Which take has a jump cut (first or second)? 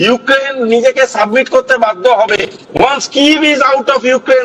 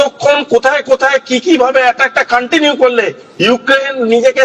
first